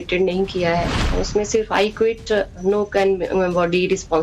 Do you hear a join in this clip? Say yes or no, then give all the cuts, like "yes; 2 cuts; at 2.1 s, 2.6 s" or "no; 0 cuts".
yes; 1 cut; at 1.0 s